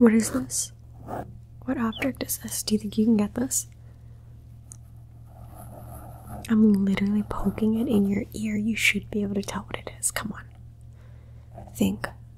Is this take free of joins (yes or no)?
yes